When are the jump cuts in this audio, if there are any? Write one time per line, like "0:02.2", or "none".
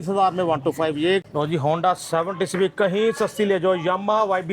0:01.2

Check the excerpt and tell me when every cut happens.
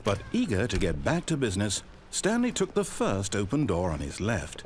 none

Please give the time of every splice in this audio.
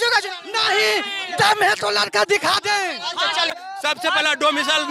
none

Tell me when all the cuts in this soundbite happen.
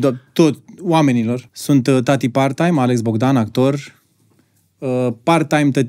0:01.5

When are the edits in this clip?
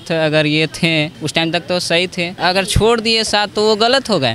0:02.3

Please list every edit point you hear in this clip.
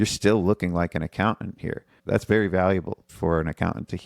0:01.9
0:03.1

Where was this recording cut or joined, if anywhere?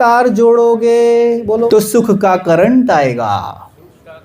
0:01.7

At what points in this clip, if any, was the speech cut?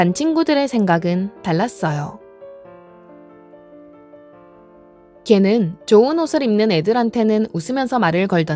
0:02.2
0:05.2

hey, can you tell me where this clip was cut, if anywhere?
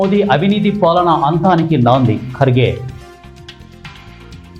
0:03.1

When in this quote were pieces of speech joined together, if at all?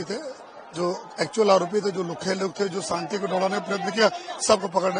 none

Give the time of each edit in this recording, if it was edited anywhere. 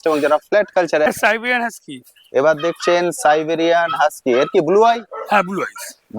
0:01.1

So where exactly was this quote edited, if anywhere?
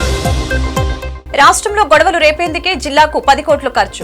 0:01.1

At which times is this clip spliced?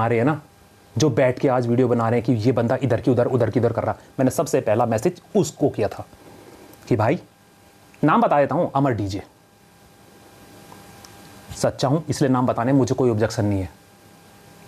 none

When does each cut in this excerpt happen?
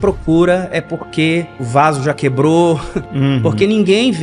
0:01.6
0:03.0

